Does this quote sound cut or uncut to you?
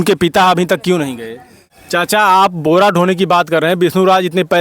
cut